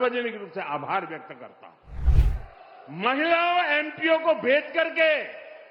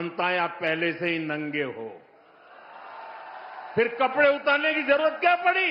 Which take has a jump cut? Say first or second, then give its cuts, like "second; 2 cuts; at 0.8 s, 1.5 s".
first; 1 cut; at 2.1 s